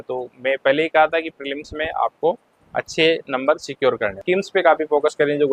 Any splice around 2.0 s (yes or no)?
no